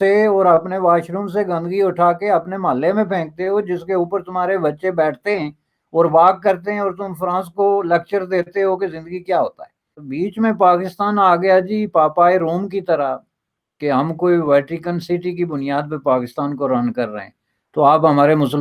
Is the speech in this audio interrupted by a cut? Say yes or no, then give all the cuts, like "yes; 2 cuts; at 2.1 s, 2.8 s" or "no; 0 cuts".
yes; 1 cut; at 10.1 s